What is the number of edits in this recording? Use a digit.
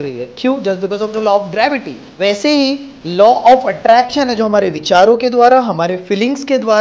1